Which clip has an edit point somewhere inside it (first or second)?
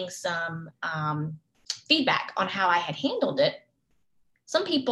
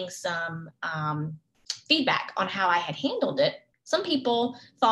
second